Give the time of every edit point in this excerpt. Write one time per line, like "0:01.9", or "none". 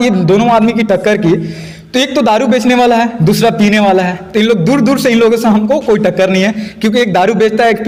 none